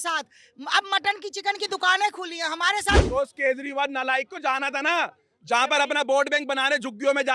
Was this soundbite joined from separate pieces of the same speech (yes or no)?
yes